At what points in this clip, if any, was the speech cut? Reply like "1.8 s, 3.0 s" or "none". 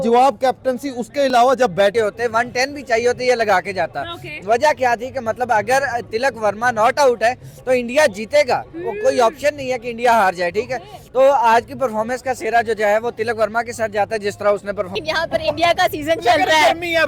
1.9 s, 15.0 s